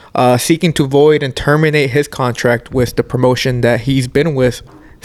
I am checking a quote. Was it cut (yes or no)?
no